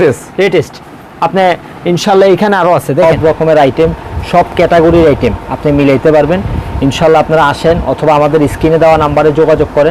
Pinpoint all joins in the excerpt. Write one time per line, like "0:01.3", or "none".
0:03.0